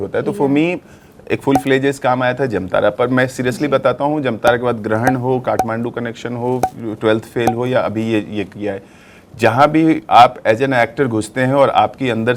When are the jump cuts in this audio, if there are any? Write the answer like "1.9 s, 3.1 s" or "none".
none